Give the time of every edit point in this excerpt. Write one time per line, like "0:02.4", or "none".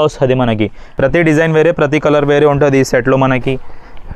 0:00.9